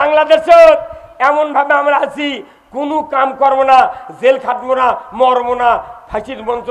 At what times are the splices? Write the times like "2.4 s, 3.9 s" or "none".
none